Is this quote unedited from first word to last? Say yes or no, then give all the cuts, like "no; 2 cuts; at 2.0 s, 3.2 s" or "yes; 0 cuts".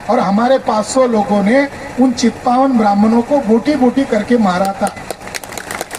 yes; 0 cuts